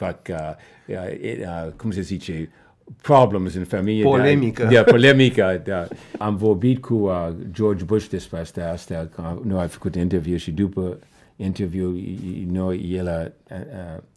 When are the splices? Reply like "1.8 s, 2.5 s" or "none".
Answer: 6.2 s